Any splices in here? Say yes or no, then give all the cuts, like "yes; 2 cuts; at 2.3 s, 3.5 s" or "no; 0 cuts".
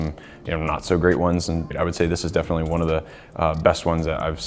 yes; 1 cut; at 1.7 s